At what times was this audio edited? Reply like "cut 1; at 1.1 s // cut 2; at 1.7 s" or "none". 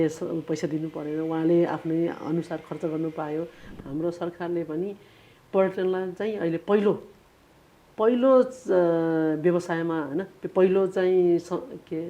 cut 1; at 3.7 s